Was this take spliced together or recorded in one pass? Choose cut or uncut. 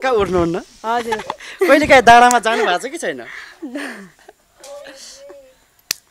uncut